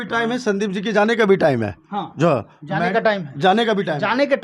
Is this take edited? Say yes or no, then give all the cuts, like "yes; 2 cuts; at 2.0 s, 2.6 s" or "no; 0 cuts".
no; 0 cuts